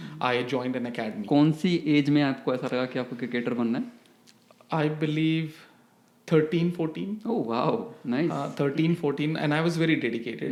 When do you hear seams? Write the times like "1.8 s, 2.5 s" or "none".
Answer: none